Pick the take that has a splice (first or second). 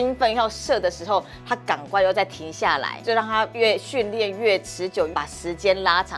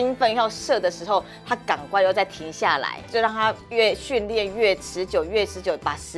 first